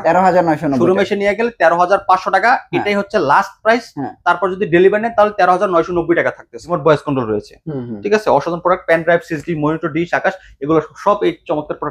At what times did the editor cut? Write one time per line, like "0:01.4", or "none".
0:06.6